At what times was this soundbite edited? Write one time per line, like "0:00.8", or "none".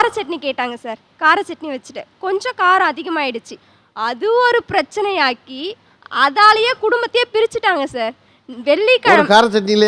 none